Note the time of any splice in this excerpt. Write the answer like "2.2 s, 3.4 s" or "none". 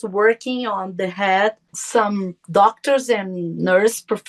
1.7 s